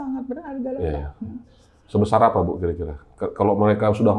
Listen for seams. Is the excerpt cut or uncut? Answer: uncut